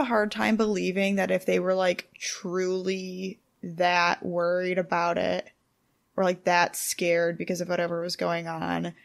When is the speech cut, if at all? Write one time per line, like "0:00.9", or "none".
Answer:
none

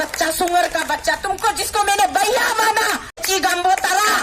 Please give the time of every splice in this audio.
0:03.2

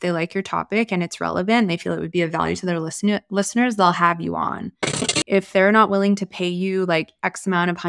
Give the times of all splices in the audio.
0:05.0

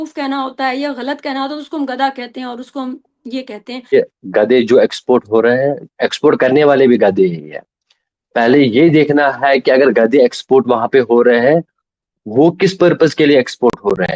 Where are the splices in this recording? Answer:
0:03.9

